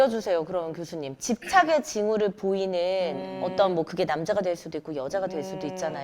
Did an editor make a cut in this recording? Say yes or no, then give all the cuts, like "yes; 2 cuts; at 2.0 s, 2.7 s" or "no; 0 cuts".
no; 0 cuts